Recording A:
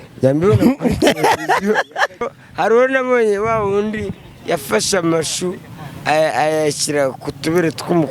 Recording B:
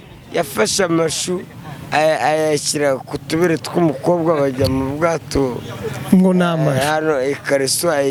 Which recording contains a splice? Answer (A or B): A